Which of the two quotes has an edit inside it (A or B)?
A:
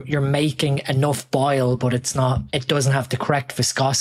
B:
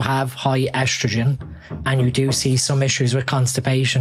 A